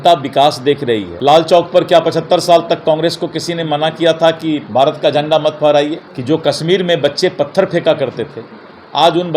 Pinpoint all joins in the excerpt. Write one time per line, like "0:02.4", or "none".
0:01.1
0:06.1